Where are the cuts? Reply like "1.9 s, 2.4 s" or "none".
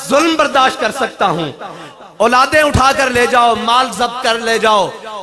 none